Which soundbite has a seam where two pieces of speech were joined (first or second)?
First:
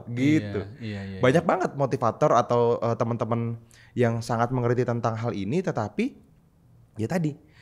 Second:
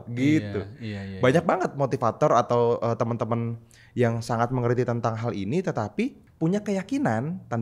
second